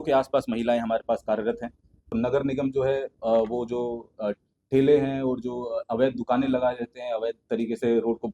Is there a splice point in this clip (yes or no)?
yes